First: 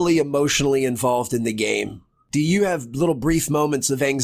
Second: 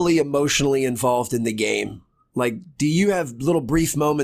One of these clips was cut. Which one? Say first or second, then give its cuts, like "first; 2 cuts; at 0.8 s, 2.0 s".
first; 1 cut; at 2.2 s